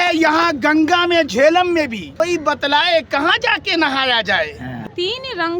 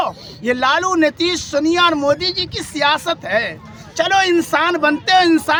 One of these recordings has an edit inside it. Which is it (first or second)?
first